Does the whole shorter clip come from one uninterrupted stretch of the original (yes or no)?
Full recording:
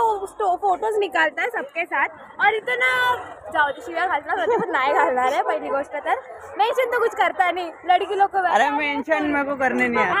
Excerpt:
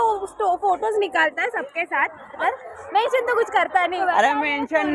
no